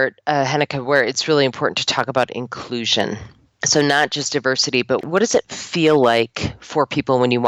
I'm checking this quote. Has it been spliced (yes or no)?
no